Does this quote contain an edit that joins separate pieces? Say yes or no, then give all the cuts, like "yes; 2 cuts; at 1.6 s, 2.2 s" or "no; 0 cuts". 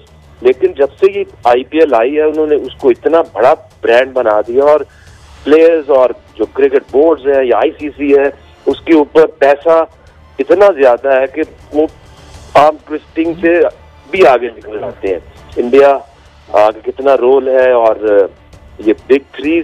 yes; 1 cut; at 15.4 s